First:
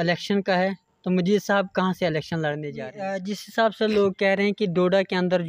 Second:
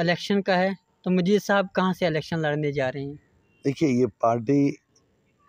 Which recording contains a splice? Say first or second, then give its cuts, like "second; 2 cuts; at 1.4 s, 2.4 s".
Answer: first; 1 cut; at 3.0 s